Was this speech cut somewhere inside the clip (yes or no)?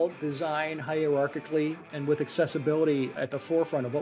yes